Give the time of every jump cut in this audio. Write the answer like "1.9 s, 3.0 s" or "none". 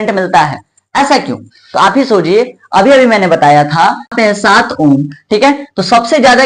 4.1 s

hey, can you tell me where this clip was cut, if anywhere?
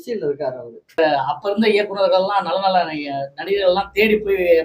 1.0 s

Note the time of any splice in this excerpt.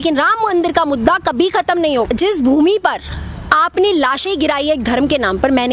2.1 s

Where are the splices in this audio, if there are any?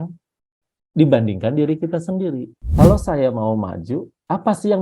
2.6 s

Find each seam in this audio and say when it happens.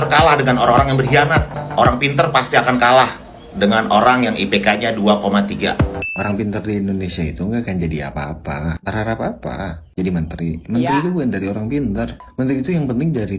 1.6 s, 6.0 s, 12.3 s

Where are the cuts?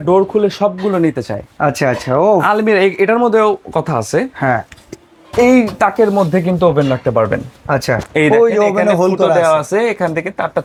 none

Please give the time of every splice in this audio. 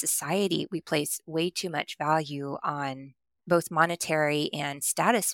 3.4 s

